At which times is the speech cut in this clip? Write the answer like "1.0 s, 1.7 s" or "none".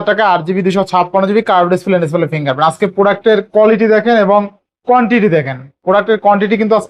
none